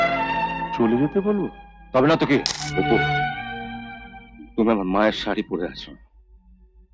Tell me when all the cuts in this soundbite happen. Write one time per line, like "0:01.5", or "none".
0:02.6